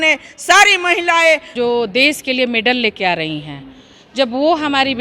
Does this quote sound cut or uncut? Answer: cut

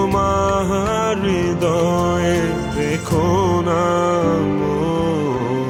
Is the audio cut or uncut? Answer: uncut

